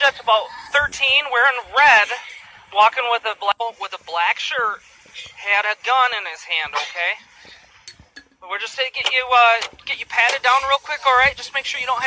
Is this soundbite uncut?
no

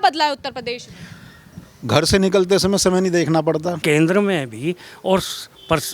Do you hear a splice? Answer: yes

